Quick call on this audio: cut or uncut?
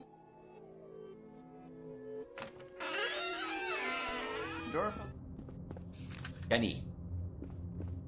cut